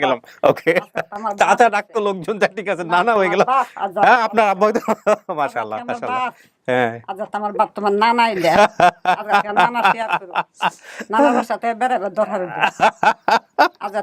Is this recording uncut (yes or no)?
yes